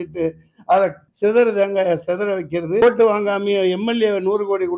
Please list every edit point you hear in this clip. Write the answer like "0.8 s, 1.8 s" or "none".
1.0 s, 2.8 s